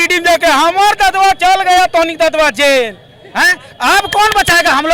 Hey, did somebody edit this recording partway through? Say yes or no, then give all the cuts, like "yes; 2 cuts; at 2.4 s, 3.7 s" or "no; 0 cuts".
no; 0 cuts